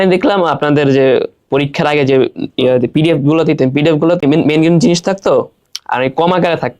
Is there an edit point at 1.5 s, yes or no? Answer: no